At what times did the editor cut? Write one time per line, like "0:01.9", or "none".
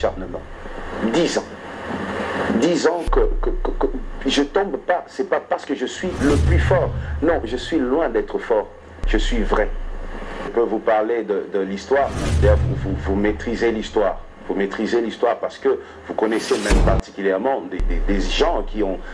none